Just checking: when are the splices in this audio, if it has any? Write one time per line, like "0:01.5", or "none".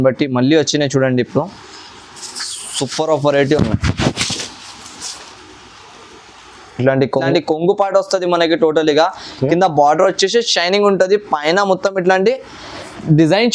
0:07.2